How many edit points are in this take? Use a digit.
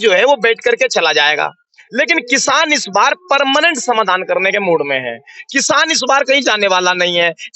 0